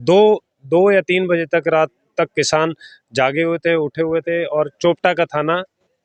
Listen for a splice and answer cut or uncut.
uncut